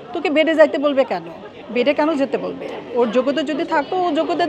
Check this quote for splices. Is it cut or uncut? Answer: uncut